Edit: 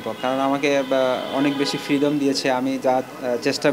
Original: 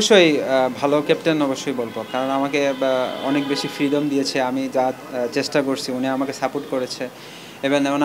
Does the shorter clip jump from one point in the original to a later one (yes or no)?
no